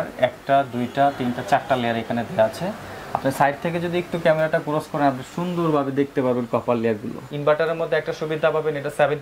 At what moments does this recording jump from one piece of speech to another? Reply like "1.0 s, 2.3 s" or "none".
7.2 s